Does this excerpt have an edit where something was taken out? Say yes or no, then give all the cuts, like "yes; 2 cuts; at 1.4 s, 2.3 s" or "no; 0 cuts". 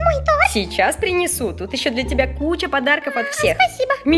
no; 0 cuts